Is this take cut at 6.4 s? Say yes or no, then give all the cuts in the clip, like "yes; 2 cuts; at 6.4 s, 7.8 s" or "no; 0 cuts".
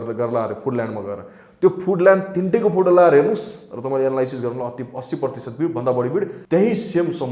yes; 1 cut; at 6.4 s